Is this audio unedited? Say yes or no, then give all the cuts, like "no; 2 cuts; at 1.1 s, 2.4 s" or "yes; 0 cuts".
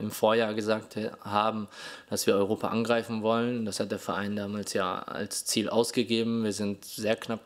yes; 0 cuts